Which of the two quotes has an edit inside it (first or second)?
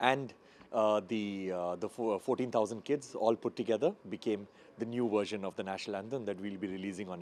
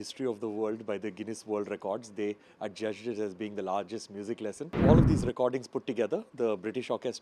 second